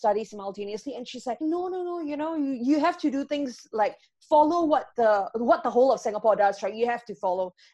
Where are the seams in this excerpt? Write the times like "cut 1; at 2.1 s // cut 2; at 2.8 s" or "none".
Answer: cut 1; at 1.4 s